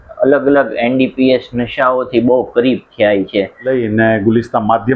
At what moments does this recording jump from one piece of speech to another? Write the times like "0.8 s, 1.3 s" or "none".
3.7 s